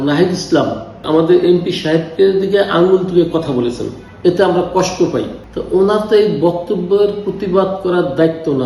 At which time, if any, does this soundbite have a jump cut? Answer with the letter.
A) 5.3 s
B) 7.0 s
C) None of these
A